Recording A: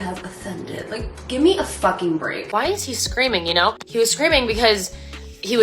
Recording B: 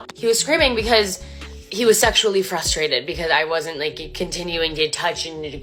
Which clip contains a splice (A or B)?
A